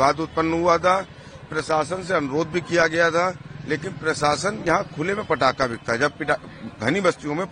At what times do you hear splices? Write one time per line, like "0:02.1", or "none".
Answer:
none